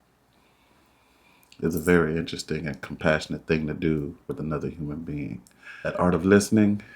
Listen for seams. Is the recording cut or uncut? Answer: cut